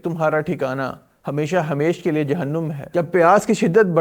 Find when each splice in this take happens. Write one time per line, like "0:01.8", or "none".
0:02.8